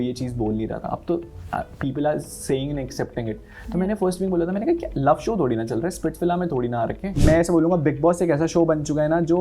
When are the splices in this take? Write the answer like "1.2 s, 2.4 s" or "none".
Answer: 7.1 s